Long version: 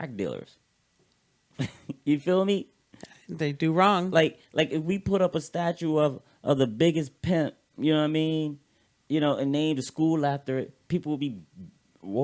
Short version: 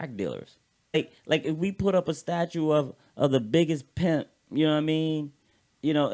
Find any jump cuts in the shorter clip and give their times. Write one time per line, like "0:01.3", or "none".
0:01.0

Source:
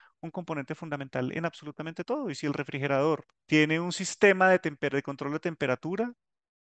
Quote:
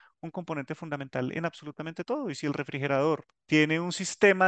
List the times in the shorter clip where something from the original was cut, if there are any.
none

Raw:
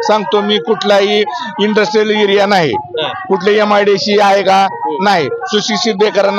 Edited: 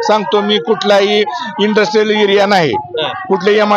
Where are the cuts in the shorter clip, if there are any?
none

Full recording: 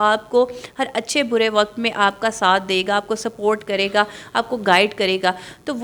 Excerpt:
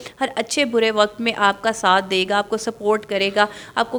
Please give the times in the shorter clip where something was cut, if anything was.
none

